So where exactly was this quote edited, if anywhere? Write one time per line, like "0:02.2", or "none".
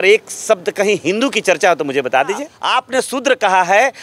0:02.6